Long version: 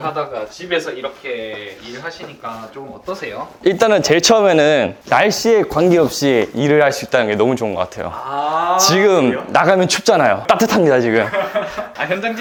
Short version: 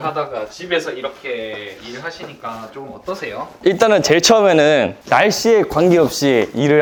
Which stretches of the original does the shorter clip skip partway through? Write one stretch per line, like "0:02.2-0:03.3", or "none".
none